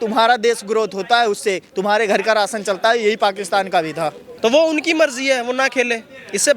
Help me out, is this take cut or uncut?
cut